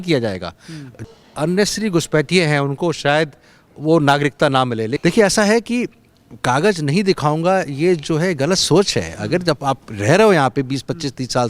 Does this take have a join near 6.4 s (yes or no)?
no